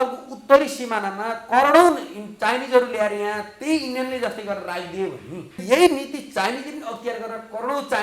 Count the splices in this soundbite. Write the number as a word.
one